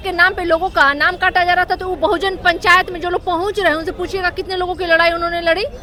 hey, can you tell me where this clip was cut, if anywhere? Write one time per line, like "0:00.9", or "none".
none